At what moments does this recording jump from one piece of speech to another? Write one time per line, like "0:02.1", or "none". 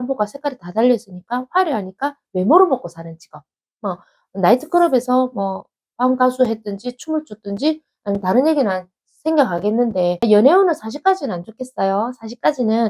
0:10.2

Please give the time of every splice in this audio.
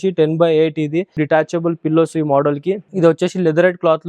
0:01.2
0:02.9

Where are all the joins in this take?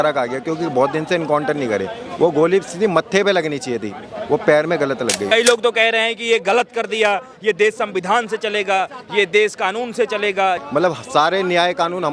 0:05.3
0:10.6

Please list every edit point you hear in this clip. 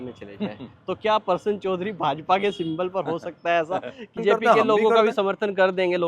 0:04.2

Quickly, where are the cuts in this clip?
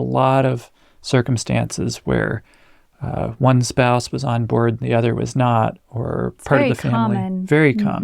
none

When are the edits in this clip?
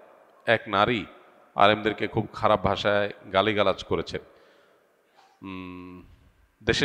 none

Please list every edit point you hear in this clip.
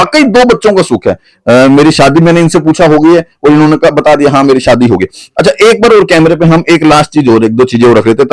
none

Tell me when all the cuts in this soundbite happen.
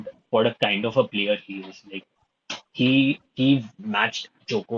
none

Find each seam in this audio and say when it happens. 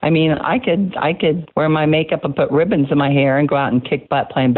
0:01.4

